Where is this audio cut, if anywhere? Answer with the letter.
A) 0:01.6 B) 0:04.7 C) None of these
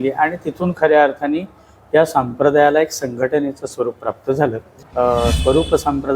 B